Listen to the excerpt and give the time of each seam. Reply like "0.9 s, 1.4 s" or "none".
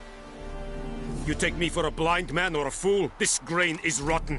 1.2 s